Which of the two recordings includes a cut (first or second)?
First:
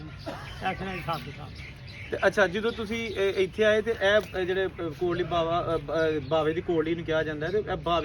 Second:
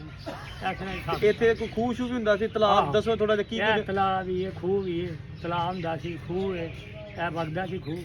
second